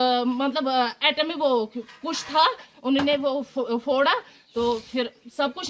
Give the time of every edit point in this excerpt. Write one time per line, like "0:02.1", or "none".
none